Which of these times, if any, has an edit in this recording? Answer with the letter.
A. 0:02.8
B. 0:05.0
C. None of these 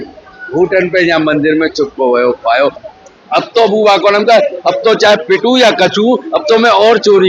A